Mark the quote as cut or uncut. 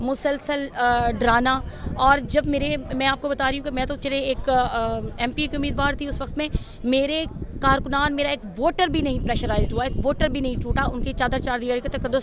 uncut